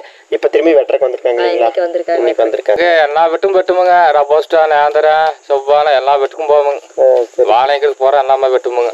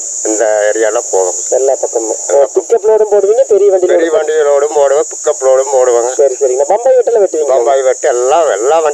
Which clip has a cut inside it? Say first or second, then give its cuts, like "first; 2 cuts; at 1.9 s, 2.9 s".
first; 1 cut; at 2.8 s